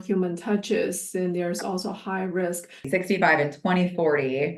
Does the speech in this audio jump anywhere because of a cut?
yes; 1 cut; at 2.9 s

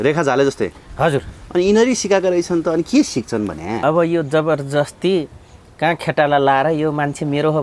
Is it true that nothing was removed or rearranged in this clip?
no; 1 cut; at 3.8 s

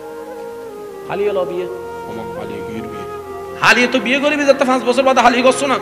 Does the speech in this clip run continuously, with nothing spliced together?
no; 1 cut; at 1.1 s

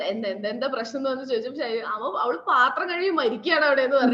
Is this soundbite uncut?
yes; 0 cuts

